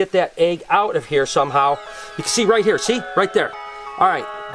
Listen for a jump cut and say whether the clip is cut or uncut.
uncut